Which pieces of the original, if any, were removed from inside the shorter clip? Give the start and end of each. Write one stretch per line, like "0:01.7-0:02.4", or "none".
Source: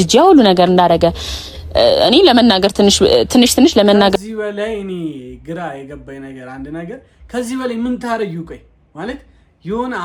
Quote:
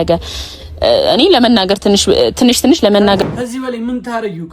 0:04.2-0:07.3